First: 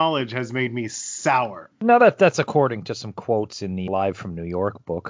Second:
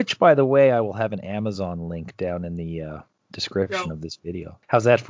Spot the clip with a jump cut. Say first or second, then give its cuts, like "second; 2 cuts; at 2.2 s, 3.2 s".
first; 2 cuts; at 1.6 s, 3.9 s